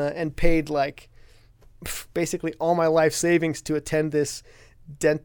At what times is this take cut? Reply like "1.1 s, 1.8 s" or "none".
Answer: none